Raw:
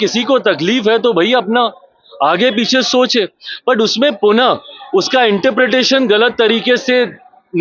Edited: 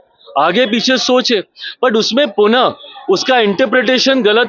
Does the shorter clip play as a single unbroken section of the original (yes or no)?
yes